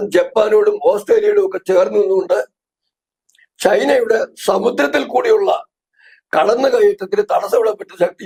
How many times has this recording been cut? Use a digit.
0